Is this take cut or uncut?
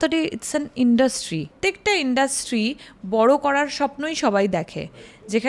cut